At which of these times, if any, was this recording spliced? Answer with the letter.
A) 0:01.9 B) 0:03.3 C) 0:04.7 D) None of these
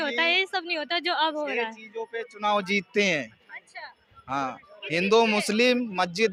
D